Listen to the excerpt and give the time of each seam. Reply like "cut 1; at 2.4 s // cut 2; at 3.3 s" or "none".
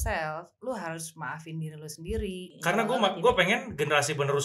cut 1; at 2.5 s